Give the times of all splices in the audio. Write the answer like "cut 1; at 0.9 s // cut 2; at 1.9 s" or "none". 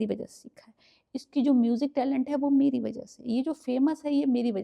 none